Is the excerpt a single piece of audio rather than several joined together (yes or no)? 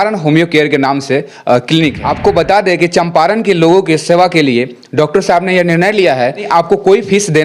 no